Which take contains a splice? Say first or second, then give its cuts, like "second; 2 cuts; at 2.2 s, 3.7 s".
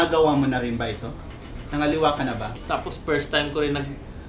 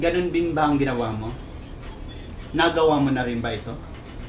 first; 1 cut; at 2.6 s